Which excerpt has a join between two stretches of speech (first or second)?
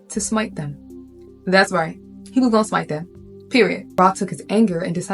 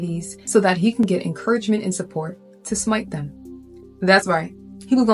first